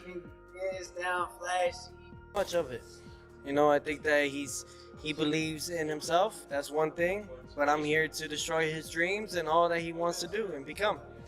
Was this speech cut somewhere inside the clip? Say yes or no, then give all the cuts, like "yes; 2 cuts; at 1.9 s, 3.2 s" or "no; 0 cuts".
yes; 1 cut; at 2.4 s